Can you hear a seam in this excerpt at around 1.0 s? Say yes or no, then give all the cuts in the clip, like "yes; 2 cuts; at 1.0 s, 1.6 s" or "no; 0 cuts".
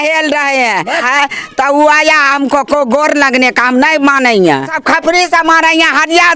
yes; 2 cuts; at 1.0 s, 4.7 s